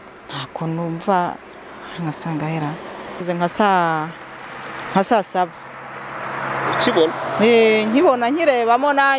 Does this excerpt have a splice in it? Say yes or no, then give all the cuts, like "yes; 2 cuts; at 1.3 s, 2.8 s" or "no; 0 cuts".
yes; 1 cut; at 3.2 s